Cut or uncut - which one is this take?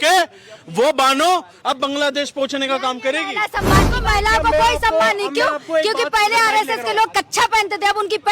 cut